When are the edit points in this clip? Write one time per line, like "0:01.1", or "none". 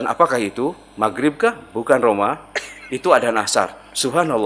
none